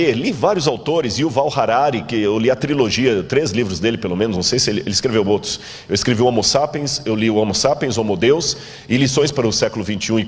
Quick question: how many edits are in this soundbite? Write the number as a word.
zero